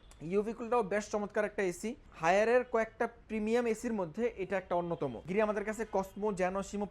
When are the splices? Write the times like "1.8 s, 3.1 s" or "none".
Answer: 2.1 s, 5.2 s